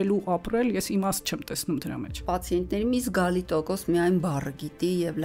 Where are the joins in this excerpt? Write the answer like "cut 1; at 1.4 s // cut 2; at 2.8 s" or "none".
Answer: cut 1; at 2.2 s